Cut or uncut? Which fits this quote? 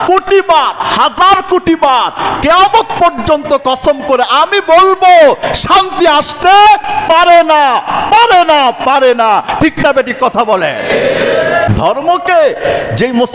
cut